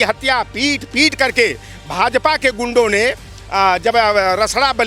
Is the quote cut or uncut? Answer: uncut